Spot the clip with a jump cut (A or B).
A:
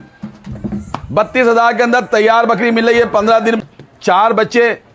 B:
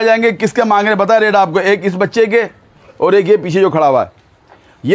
A